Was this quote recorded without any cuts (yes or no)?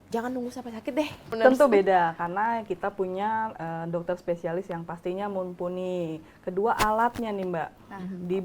no